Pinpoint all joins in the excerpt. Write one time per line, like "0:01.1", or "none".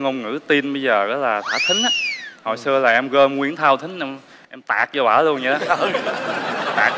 none